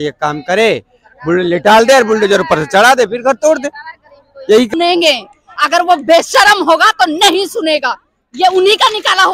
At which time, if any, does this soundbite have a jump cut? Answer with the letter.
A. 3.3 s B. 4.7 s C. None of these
B